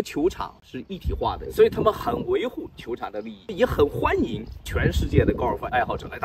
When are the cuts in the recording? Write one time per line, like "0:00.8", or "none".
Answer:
0:01.4
0:03.5